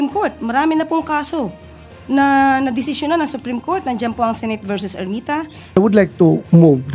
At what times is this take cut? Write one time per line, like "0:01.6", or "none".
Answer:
0:05.8